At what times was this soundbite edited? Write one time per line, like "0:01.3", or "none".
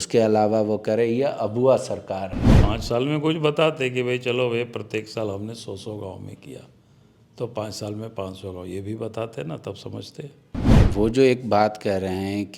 0:02.5
0:10.8